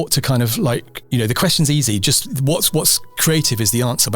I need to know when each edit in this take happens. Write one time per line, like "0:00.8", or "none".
0:01.0